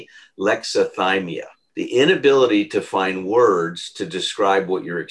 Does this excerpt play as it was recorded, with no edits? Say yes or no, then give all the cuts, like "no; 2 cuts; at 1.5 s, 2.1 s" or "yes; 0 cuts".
no; 1 cut; at 1.6 s